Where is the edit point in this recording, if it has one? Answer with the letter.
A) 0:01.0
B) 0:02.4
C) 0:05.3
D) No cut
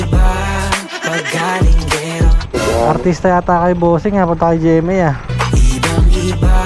B